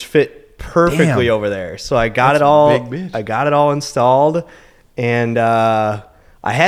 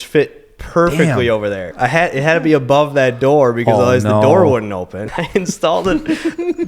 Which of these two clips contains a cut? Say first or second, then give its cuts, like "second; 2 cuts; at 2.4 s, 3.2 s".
second; 2 cuts; at 1.7 s, 4.9 s